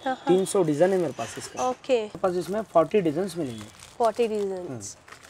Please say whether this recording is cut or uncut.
cut